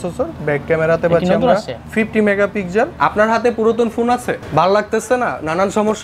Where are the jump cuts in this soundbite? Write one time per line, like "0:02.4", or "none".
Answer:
0:01.8
0:02.9
0:04.4